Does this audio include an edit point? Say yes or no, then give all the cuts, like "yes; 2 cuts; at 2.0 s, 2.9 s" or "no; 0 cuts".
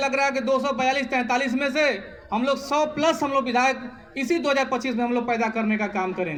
no; 0 cuts